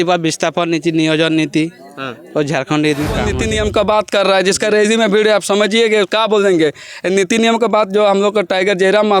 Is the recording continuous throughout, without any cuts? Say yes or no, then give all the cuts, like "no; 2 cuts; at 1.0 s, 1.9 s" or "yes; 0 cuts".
no; 1 cut; at 3.4 s